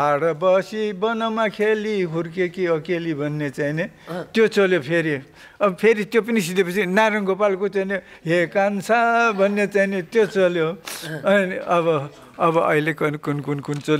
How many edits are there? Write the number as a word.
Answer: zero